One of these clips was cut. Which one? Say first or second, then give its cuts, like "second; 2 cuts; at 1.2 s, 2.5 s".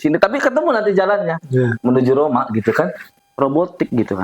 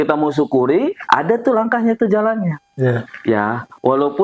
first; 1 cut; at 3.0 s